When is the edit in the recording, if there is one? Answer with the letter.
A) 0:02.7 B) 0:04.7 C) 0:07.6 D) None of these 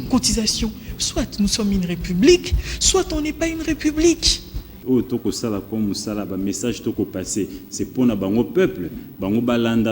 B